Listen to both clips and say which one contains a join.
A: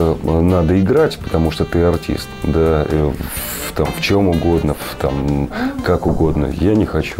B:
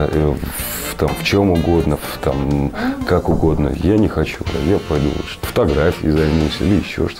B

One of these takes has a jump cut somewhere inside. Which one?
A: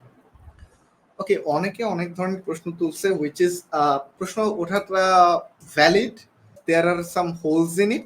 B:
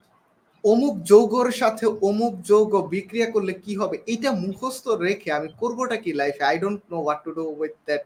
A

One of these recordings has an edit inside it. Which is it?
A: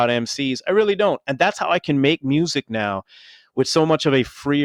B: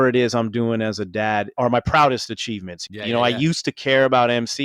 B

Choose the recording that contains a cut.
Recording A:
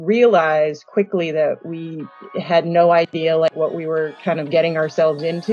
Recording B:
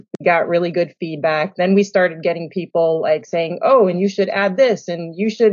A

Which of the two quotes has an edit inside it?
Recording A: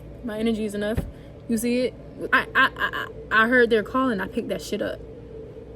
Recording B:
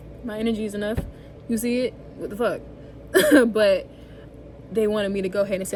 A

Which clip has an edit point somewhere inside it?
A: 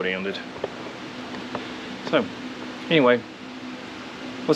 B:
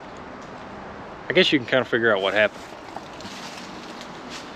B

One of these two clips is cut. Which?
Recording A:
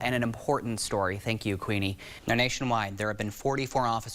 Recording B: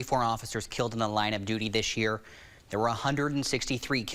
A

